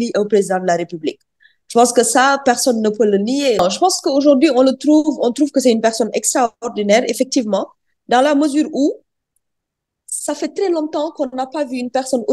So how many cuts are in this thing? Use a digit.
1